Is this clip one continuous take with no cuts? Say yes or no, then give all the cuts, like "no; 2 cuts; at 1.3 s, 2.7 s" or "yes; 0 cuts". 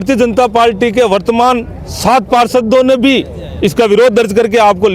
yes; 0 cuts